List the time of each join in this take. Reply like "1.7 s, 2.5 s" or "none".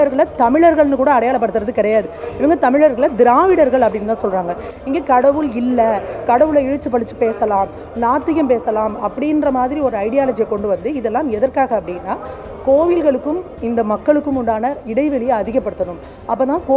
none